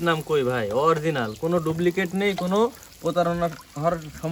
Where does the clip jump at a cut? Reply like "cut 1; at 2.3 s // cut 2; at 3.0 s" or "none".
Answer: none